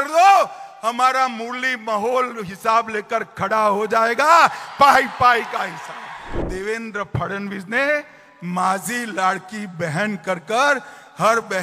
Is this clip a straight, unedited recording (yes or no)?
no